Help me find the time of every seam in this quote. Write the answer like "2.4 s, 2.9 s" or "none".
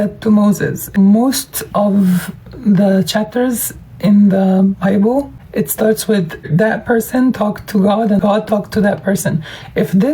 0.8 s, 5.4 s, 6.5 s, 8.2 s